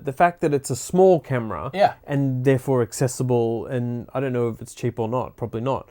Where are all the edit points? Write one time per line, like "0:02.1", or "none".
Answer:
none